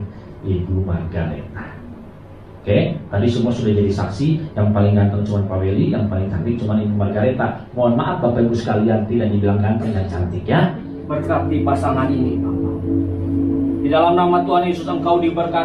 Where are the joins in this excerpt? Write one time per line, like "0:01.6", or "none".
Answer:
0:11.0